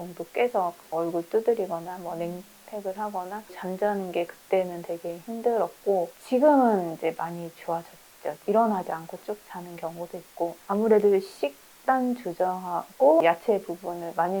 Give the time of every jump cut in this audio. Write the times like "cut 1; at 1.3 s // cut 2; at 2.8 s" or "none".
cut 1; at 3.6 s // cut 2; at 6.2 s // cut 3; at 8.4 s // cut 4; at 10.6 s // cut 5; at 13.2 s

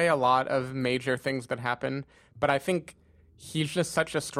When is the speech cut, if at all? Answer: none

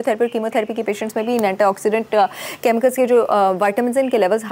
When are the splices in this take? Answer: none

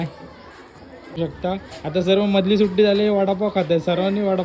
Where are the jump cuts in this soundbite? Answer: cut 1; at 1.2 s

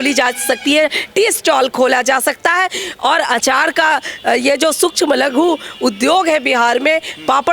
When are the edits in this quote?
none

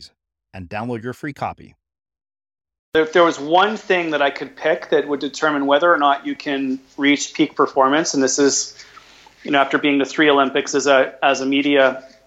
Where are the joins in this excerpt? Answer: cut 1; at 2.9 s

